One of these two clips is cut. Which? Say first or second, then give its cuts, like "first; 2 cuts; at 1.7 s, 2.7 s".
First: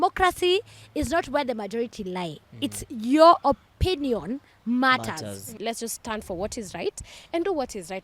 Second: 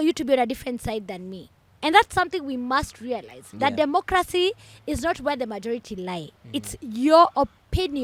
first; 1 cut; at 5.5 s